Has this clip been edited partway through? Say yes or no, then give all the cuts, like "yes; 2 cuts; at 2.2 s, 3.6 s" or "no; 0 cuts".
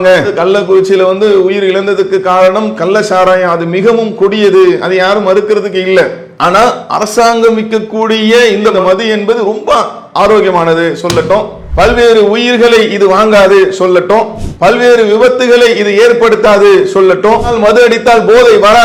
no; 0 cuts